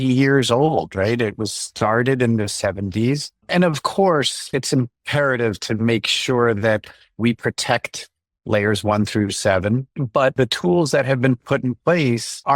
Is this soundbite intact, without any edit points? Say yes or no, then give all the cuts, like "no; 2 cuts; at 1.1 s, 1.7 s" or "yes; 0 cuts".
no; 2 cuts; at 3.4 s, 9.9 s